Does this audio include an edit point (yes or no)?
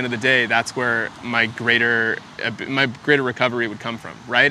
no